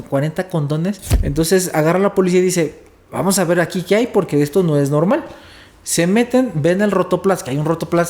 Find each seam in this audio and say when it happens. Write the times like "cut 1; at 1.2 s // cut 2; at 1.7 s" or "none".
cut 1; at 1.1 s